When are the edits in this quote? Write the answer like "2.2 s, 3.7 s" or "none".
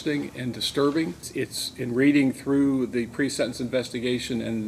1.3 s

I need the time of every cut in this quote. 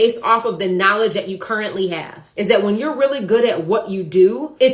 2.2 s

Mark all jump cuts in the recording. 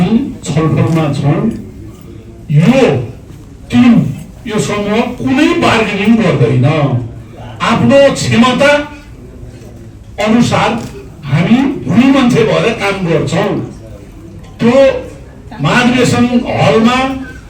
none

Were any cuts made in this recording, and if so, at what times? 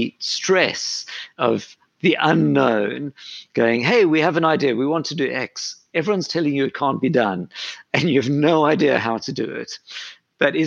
1.3 s

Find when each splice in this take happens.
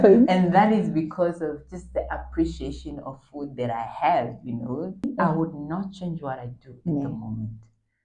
5.0 s

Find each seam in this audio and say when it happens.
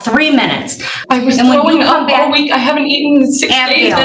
1.0 s

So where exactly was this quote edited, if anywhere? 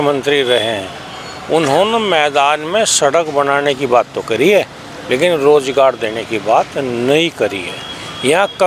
none

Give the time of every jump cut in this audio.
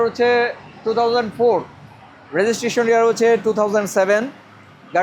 none

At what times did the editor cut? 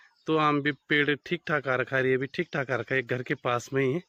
none

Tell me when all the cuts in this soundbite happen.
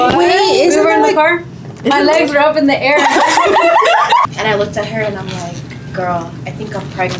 4.2 s

